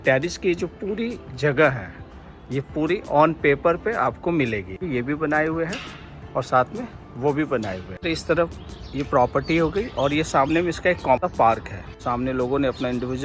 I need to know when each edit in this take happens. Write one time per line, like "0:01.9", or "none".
0:04.9
0:08.0
0:11.8